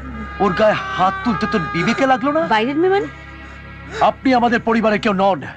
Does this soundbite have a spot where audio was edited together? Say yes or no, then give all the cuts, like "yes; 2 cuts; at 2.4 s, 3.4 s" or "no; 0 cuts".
no; 0 cuts